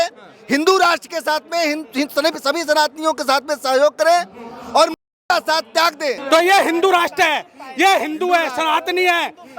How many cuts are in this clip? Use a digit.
1